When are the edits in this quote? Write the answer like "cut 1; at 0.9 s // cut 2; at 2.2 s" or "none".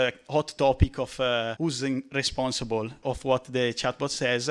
cut 1; at 1.5 s // cut 2; at 3.0 s